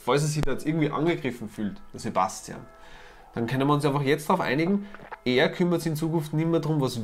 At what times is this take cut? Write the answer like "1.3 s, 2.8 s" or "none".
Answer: none